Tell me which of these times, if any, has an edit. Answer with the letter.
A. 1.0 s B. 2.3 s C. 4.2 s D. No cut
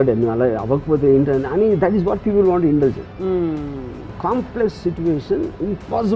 C